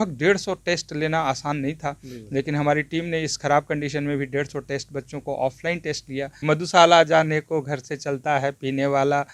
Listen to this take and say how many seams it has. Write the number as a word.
one